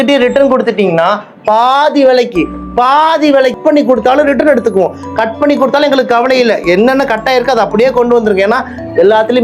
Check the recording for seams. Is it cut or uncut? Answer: cut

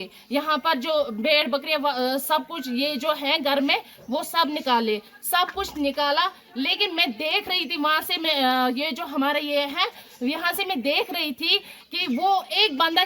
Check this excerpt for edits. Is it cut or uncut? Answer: uncut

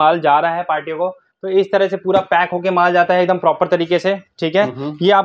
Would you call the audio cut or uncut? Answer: uncut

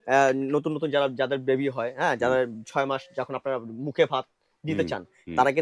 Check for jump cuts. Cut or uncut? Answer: uncut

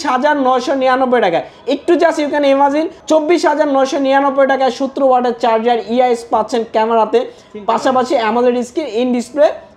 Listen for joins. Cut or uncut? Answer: cut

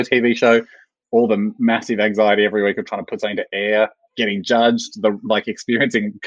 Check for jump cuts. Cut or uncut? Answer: uncut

